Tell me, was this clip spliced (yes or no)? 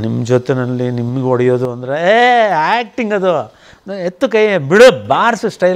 no